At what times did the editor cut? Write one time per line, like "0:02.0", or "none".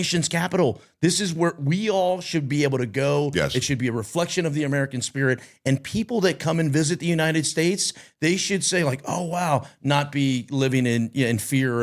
none